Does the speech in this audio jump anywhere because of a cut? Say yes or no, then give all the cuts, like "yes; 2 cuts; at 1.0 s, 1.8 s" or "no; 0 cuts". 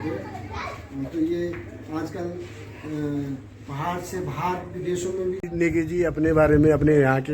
yes; 1 cut; at 5.4 s